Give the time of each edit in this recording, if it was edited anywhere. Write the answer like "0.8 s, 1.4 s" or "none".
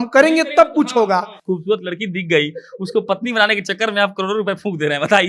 1.4 s

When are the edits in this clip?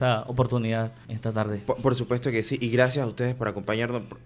1.0 s

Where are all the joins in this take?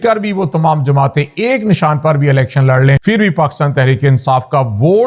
3.0 s

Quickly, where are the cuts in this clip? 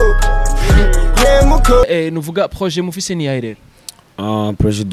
1.9 s

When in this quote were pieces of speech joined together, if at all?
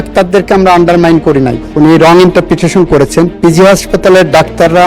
1.6 s

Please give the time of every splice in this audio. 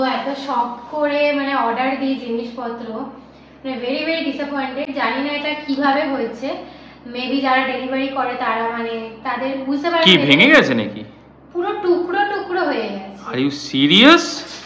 none

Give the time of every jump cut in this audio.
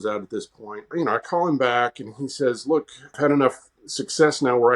0.9 s, 3.2 s

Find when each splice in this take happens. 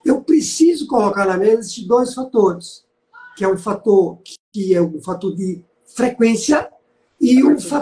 none

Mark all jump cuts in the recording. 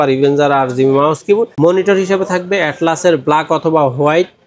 1.5 s

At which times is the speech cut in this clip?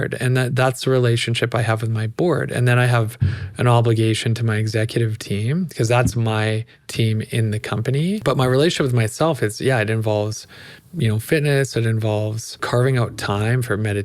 8.2 s, 12.6 s

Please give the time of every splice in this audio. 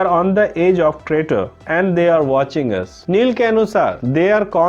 none

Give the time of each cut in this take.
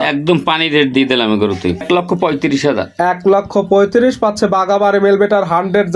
1.8 s

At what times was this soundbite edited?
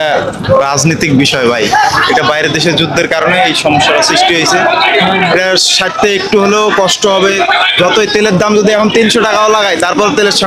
none

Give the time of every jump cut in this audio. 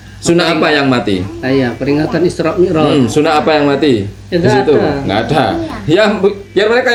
none

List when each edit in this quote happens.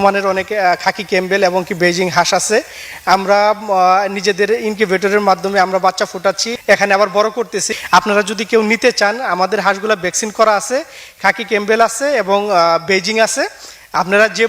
6.5 s, 7.6 s

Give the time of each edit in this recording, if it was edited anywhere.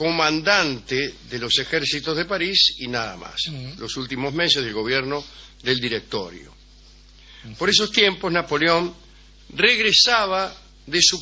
1.5 s

